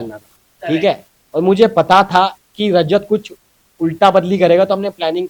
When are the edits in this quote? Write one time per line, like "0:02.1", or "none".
none